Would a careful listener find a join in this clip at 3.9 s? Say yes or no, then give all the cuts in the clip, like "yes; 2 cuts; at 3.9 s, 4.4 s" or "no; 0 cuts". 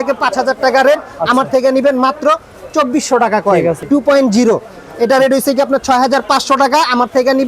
yes; 1 cut; at 3.9 s